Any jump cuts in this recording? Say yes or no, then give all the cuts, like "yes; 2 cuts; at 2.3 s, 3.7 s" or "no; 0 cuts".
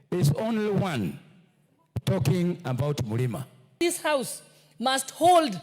yes; 1 cut; at 3.7 s